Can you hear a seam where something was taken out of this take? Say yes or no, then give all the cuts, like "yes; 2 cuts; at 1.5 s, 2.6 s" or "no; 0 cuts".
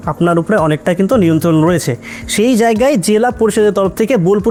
no; 0 cuts